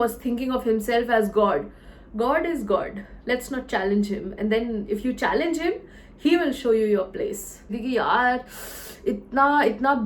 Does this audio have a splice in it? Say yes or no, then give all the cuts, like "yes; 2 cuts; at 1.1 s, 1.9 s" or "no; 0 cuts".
yes; 1 cut; at 7.7 s